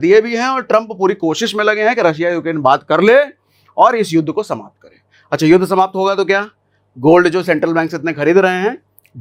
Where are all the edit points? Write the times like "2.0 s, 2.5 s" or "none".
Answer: none